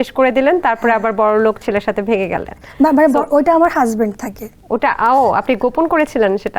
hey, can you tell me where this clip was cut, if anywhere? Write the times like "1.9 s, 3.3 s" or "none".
none